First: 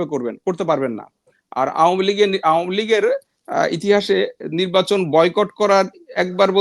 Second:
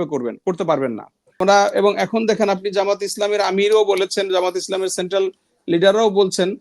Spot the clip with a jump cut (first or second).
second